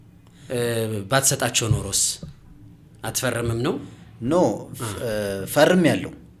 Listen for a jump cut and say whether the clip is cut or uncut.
uncut